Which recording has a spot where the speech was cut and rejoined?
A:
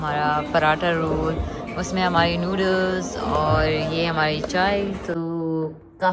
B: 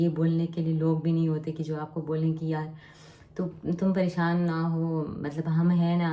A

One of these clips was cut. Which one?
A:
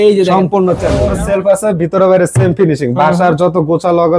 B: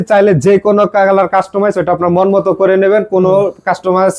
A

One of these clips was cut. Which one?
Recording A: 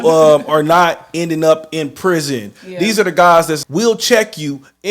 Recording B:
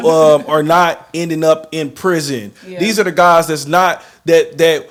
A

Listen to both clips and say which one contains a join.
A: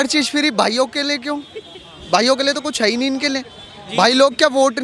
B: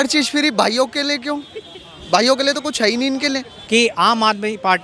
B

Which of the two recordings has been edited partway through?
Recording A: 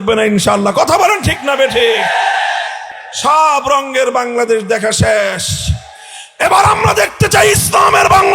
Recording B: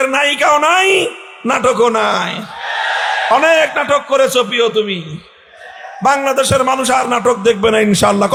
A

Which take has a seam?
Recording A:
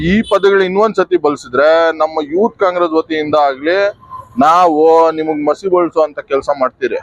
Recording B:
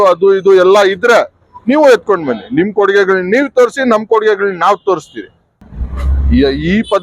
B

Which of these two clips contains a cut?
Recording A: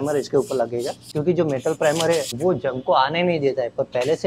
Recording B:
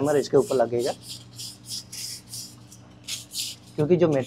A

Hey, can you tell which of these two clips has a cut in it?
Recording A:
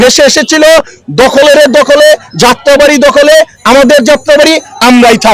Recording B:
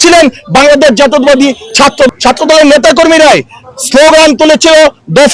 B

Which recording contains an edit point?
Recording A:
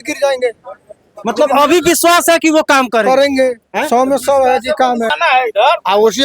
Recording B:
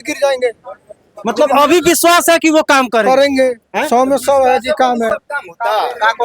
A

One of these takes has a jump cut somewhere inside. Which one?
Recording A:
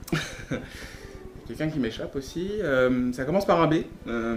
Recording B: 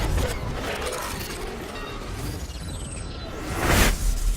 B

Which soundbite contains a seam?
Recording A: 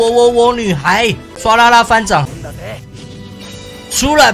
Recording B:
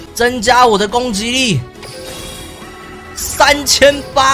A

